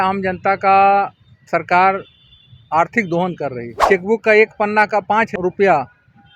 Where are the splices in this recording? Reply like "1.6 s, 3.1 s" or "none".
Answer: 3.7 s, 5.3 s

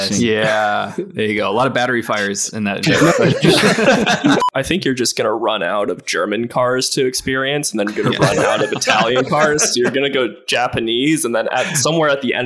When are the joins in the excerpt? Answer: 4.4 s

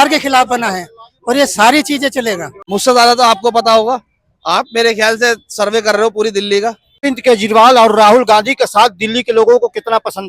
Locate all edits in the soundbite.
2.5 s, 7.0 s

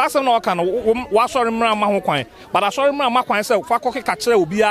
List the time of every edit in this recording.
none

